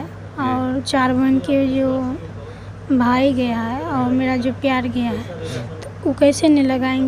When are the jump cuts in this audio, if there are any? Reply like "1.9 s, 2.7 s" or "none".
none